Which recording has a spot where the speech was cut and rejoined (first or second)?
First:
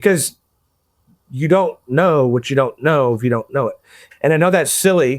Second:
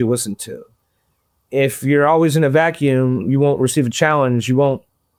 first